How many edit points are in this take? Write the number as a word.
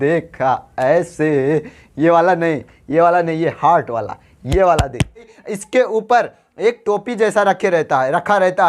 one